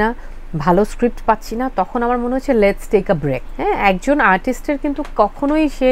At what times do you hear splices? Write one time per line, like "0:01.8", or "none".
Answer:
none